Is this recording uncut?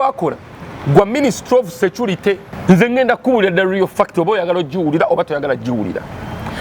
no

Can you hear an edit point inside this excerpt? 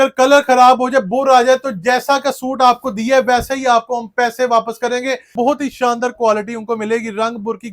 yes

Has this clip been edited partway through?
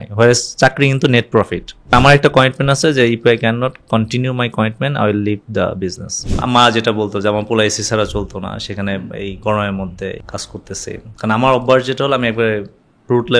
yes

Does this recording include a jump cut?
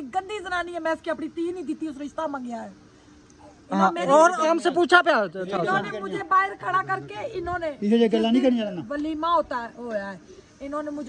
no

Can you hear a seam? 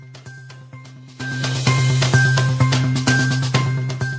yes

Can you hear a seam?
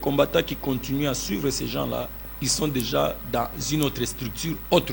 no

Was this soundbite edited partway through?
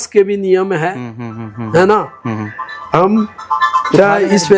no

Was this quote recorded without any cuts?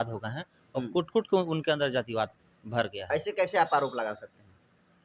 yes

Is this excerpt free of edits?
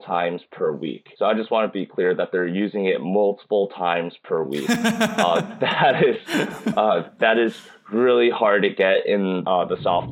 yes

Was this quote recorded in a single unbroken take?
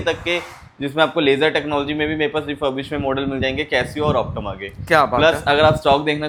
yes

